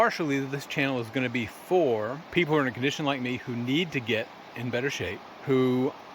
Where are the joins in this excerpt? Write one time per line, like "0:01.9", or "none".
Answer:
0:02.2
0:05.3